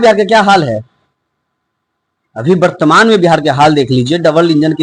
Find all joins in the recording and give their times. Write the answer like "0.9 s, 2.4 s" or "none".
none